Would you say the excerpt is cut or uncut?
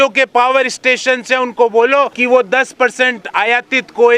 cut